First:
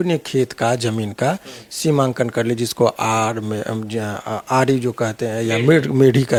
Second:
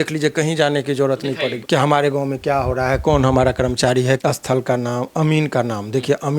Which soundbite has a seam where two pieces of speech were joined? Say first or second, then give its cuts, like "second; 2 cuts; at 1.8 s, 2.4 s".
second; 2 cuts; at 1.6 s, 4.2 s